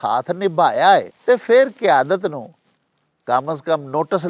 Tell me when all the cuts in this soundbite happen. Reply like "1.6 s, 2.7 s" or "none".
1.1 s